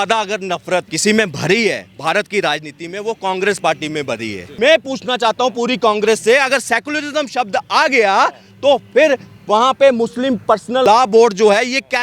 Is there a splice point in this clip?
yes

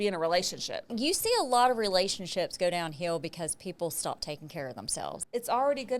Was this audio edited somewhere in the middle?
yes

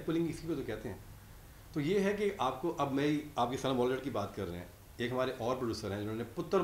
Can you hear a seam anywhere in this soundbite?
no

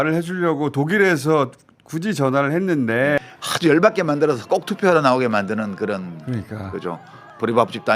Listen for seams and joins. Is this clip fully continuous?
no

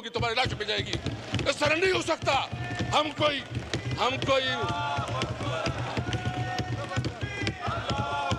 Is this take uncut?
yes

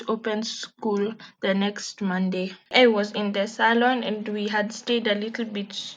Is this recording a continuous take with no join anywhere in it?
no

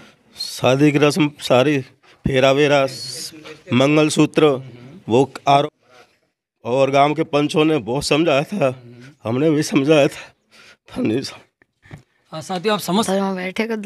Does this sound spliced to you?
yes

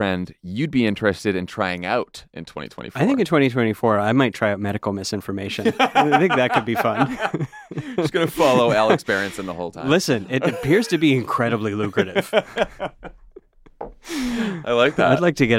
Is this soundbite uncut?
yes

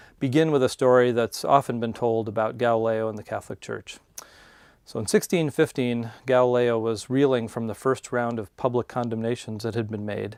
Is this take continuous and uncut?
yes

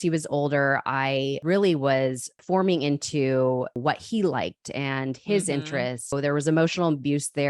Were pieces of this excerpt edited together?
yes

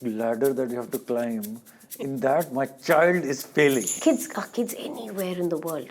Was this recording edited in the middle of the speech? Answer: yes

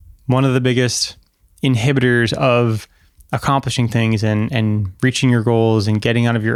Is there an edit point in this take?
no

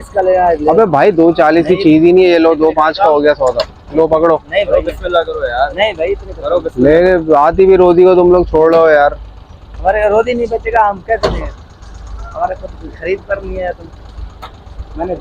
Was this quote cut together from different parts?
no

